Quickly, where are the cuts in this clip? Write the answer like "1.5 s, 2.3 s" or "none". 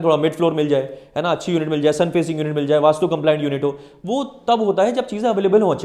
none